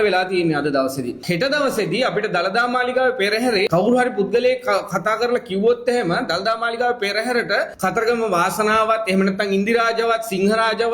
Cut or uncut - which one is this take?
cut